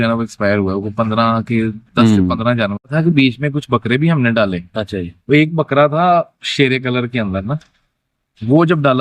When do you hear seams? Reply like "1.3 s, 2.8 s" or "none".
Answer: 2.9 s

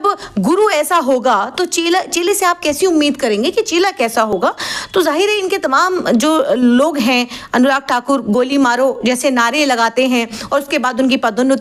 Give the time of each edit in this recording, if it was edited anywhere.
none

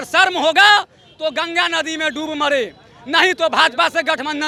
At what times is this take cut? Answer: none

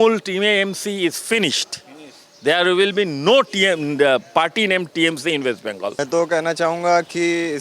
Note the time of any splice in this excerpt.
6.0 s

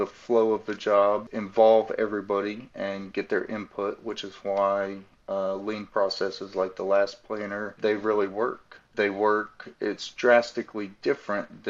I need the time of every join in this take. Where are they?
1.3 s, 7.8 s, 8.9 s

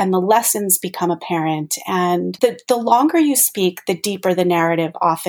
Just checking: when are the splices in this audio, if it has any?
2.3 s

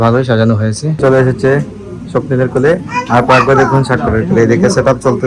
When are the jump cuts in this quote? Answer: 1.0 s

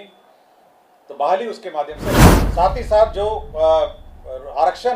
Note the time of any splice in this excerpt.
2.3 s

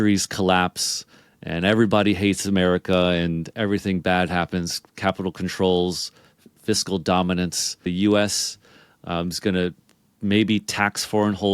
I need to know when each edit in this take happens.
7.9 s

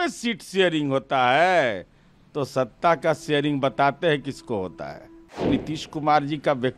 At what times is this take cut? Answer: 5.5 s

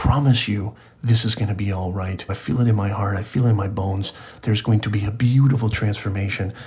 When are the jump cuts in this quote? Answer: 2.4 s

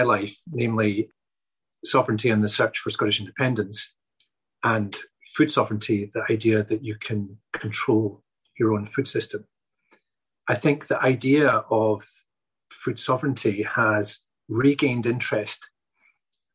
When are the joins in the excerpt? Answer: 1.1 s, 10.3 s

